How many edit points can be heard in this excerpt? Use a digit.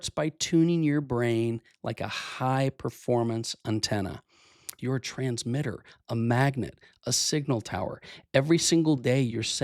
1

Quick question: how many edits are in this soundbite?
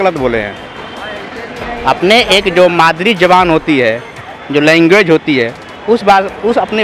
0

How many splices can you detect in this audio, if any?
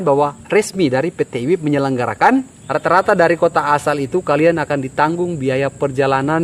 1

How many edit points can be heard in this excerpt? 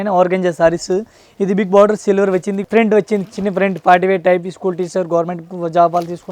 1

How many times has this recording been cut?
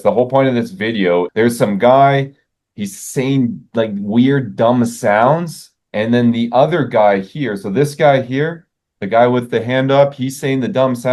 1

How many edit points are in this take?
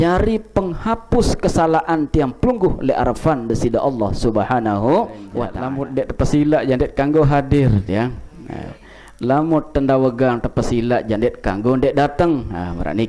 1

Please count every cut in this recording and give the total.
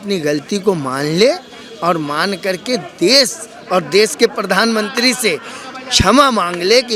0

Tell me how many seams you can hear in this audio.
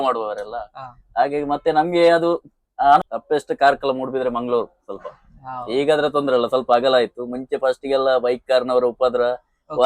1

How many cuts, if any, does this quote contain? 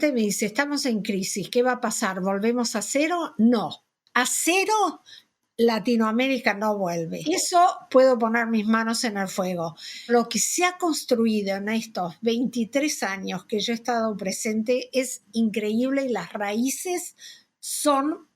2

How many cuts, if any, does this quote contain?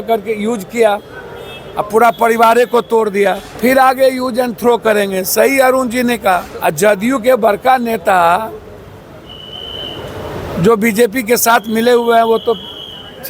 2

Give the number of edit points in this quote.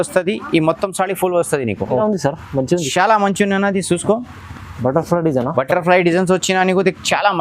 1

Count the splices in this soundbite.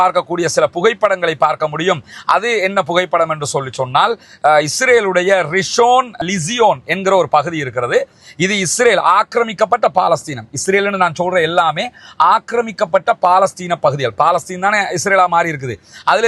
0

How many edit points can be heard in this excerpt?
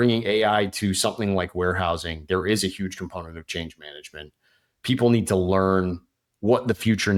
0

